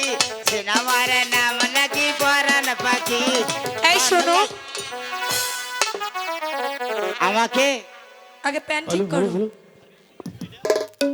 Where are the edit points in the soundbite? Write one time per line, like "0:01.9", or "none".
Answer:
none